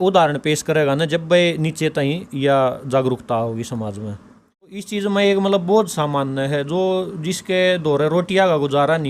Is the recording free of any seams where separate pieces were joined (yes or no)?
no